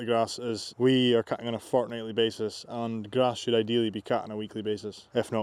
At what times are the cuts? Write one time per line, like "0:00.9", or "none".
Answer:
none